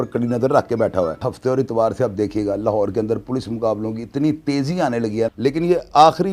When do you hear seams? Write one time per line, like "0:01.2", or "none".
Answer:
0:01.3
0:05.3